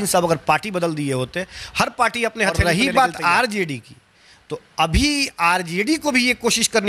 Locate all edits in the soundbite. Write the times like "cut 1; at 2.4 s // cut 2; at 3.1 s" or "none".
cut 1; at 2.6 s